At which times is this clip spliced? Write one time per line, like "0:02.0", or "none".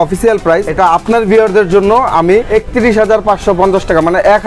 0:02.5

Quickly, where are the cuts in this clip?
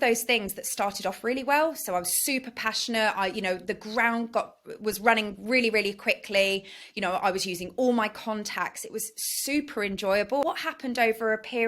0:10.4

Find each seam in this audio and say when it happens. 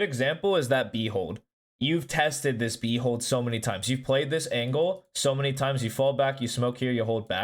none

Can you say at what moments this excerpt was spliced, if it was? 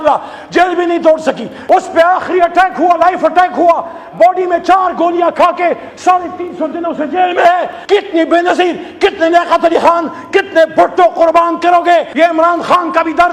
0:01.5
0:07.8
0:12.1

